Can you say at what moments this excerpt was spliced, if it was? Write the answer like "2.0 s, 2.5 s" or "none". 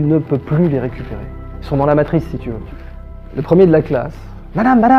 2.7 s